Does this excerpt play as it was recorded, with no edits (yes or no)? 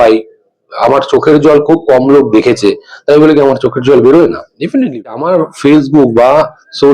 no